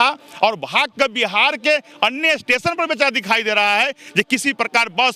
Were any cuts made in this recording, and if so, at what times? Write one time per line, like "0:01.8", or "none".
none